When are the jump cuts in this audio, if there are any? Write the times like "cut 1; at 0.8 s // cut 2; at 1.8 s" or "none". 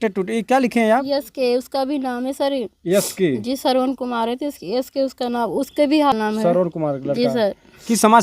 cut 1; at 6.1 s